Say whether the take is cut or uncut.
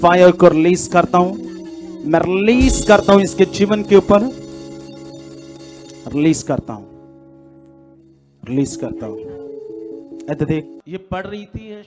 cut